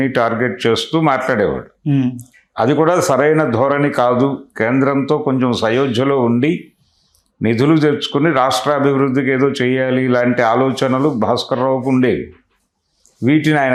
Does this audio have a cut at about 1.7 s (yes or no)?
no